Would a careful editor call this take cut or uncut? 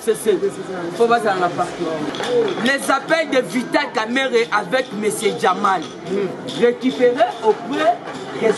cut